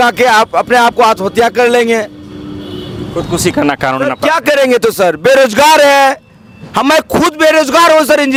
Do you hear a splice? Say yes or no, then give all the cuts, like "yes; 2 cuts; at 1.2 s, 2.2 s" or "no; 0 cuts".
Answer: no; 0 cuts